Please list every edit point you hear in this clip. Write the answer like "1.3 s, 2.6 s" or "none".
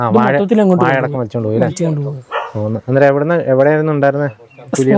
none

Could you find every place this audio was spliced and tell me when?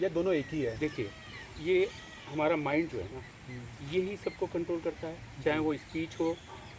none

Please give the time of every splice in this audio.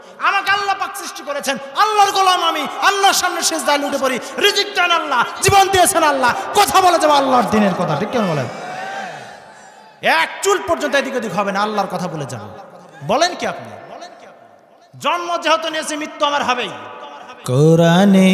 17.3 s

